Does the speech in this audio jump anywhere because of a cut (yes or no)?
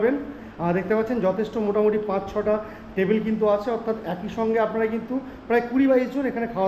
no